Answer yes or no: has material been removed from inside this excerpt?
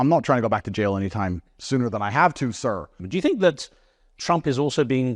yes